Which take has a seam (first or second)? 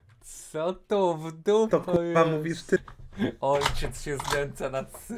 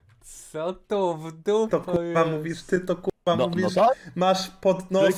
first